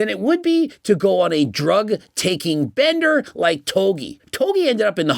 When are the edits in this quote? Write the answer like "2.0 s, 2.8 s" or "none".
4.2 s